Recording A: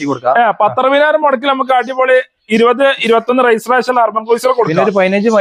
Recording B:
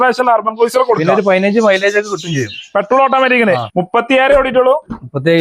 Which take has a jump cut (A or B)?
B